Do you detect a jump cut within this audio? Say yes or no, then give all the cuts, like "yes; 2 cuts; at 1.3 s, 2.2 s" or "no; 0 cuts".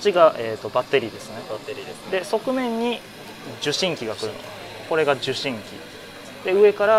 no; 0 cuts